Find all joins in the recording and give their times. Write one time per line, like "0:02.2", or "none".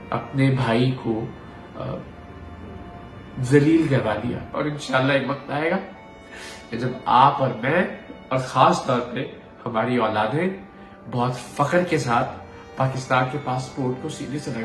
0:04.5